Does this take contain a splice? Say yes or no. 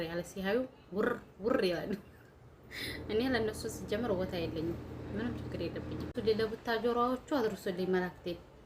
yes